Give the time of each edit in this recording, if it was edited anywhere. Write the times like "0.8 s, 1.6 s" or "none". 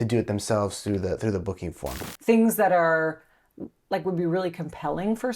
2.1 s